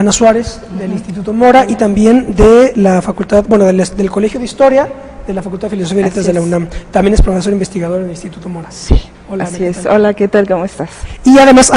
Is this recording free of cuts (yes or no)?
yes